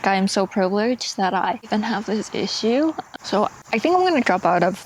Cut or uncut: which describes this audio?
uncut